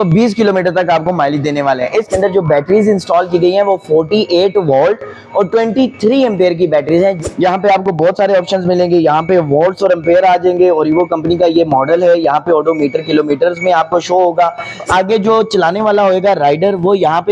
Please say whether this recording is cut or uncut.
cut